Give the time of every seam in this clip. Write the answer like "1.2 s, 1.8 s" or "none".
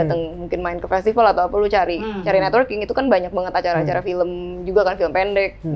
none